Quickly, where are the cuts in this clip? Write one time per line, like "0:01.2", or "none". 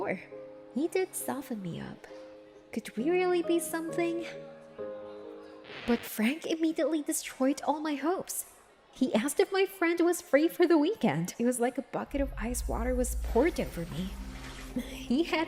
none